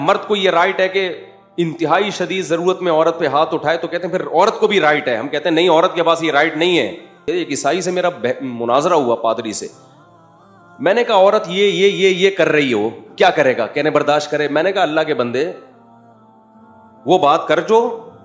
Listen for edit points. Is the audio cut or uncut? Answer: cut